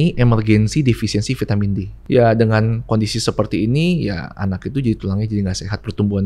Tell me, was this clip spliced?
yes; 1 cut; at 1.9 s

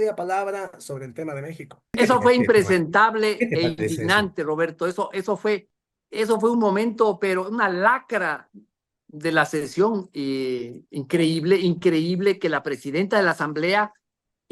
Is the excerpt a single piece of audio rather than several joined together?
no; 1 cut; at 1.8 s

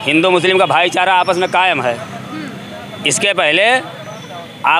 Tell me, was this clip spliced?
no; 0 cuts

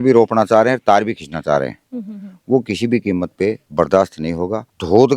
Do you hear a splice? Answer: no; 0 cuts

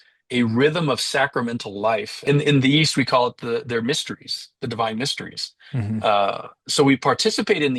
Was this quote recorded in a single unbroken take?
no; 1 cut; at 2.1 s

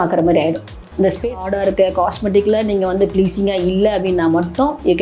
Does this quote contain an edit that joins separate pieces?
yes; 1 cut; at 1.4 s

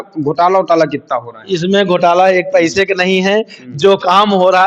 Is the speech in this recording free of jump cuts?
yes; 0 cuts

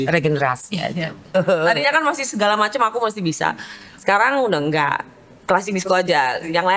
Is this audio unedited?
no; 1 cut; at 1.3 s

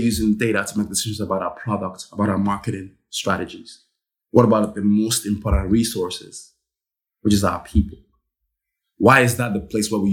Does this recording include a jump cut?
no; 0 cuts

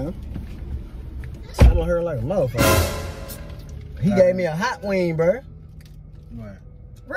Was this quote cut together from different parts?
no; 0 cuts

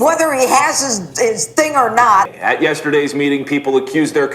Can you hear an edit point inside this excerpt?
yes; 1 cut; at 2.3 s

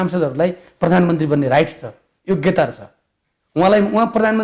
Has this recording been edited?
no; 0 cuts

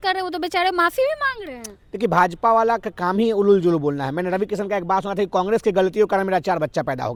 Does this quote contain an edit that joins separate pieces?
no; 0 cuts

